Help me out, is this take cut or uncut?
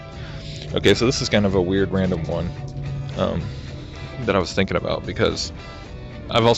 cut